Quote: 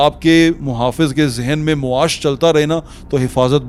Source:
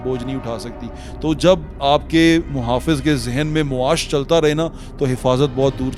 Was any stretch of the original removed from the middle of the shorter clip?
no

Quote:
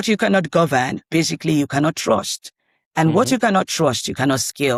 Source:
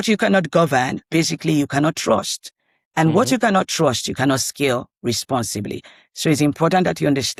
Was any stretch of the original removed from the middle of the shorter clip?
no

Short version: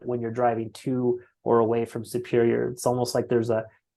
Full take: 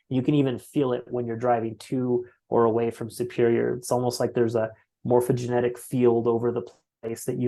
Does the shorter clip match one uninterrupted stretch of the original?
yes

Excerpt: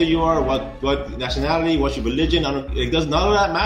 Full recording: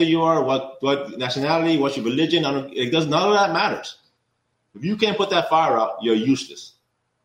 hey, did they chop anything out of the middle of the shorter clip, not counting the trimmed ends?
no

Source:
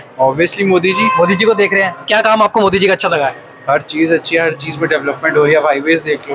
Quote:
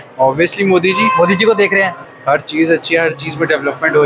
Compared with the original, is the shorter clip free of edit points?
no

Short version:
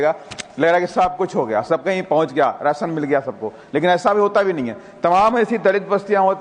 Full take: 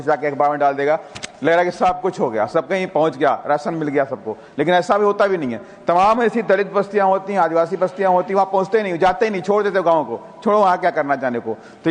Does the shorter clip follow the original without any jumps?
yes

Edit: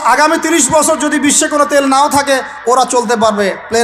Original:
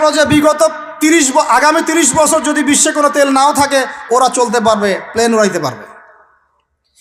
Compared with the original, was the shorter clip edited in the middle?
no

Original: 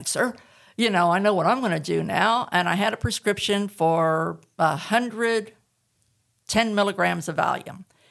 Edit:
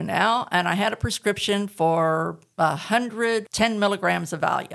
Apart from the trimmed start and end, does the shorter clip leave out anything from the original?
yes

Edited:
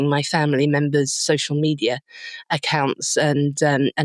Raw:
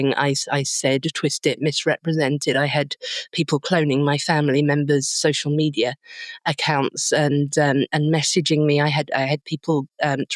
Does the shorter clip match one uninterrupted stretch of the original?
yes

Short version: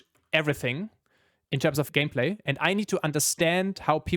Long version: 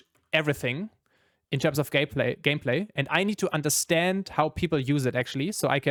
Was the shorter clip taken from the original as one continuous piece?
no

